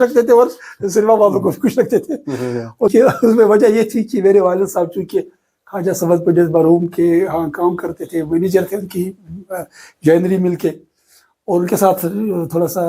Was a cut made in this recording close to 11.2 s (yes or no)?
no